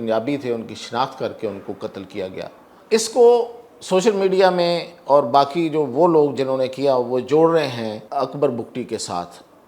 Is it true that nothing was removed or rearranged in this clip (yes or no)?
no